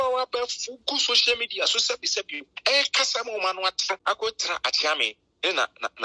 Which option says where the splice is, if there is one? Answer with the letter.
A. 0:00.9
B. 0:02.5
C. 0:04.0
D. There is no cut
C